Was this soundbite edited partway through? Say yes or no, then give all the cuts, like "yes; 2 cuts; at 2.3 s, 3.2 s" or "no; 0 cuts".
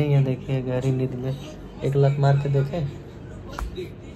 no; 0 cuts